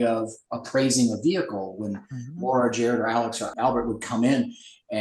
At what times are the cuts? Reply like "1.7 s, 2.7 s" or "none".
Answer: 3.5 s